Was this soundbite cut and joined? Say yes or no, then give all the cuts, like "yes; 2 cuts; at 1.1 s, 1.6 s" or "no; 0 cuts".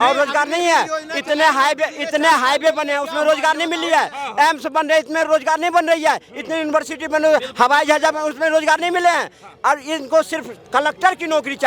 no; 0 cuts